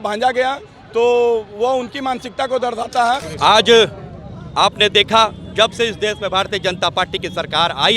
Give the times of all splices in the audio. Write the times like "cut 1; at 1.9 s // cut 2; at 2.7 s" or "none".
cut 1; at 3.3 s